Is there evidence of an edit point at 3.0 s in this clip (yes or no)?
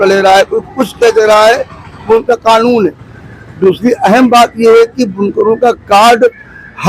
no